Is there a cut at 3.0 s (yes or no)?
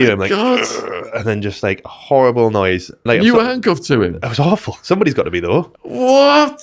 yes